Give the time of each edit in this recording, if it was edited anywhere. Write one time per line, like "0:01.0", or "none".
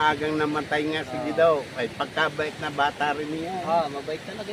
none

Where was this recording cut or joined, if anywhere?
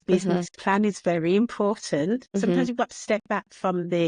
0:02.3

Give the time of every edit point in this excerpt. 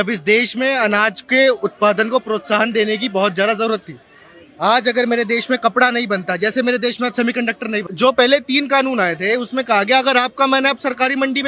0:07.9

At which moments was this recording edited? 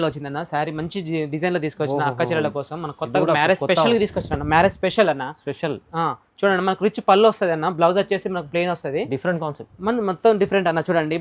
none

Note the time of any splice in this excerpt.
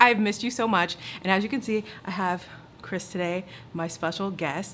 none

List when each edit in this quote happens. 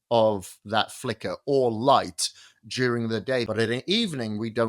0:03.5

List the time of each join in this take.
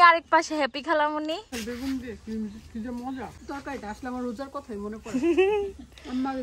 0:01.5
0:03.4

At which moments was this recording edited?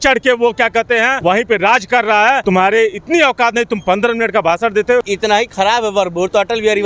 0:01.1
0:02.4
0:05.1

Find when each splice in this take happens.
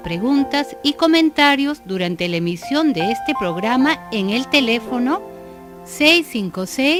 none

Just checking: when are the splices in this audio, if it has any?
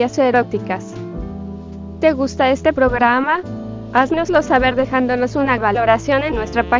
0:00.8
0:02.0

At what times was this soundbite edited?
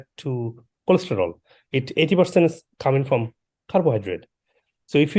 none

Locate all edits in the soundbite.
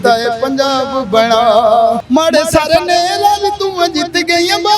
0:02.0

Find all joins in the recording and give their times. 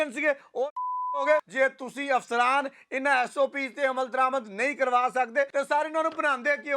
0:01.5
0:05.5

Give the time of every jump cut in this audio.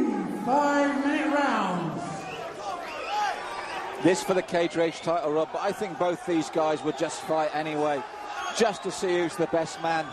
0:01.0

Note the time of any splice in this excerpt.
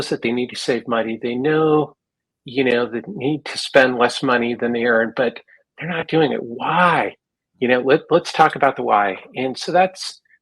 none

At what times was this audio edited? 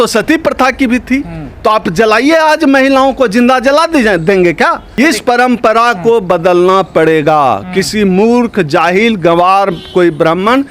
0:04.9

